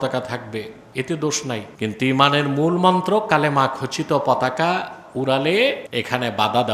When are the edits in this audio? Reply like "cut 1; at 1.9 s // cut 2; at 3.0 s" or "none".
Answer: cut 1; at 1.7 s // cut 2; at 5.8 s